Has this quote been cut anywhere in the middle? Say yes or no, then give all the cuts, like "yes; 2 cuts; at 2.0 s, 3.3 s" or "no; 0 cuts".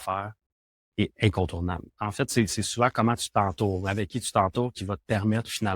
yes; 1 cut; at 2.0 s